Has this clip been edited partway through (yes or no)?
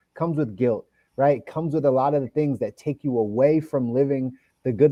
no